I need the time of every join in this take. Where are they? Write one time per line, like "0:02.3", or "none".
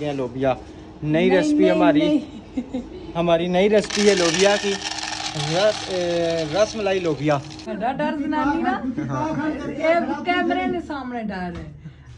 0:07.6